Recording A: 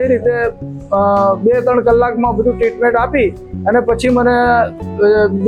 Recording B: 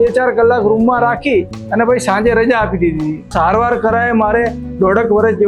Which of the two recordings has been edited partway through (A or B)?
B